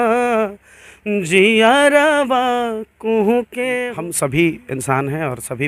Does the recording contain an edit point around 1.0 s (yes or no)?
no